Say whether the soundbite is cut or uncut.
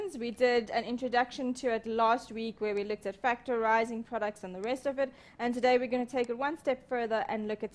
cut